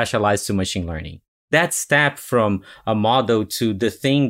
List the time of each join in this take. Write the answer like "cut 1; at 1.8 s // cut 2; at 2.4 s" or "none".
cut 1; at 1.5 s